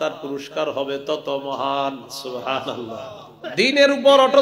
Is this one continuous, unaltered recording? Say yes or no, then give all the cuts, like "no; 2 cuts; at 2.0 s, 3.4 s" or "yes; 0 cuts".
no; 1 cut; at 3.3 s